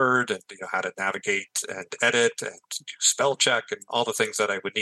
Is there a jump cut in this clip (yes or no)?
no